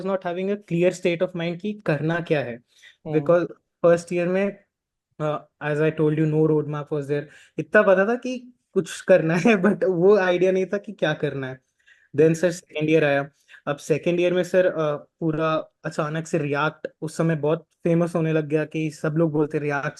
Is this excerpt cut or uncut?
uncut